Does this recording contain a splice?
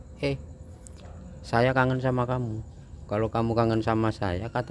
no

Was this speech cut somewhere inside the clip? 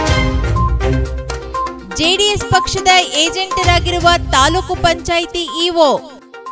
yes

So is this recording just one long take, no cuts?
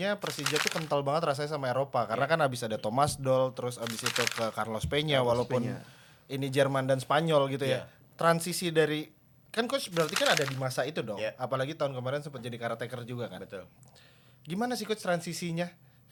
yes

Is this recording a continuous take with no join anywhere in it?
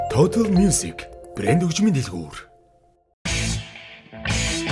no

